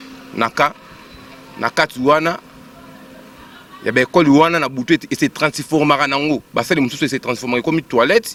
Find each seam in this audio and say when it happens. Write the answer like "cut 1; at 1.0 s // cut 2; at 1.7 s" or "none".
none